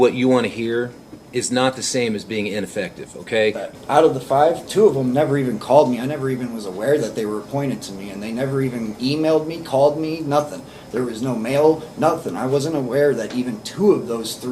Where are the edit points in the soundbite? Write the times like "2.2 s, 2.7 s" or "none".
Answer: 3.7 s